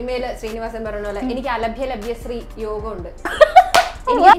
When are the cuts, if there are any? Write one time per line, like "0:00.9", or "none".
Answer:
0:03.3